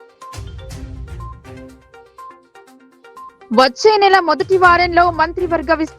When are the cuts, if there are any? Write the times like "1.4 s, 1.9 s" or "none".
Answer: 3.4 s